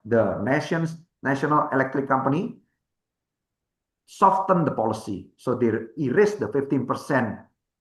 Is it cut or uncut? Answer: uncut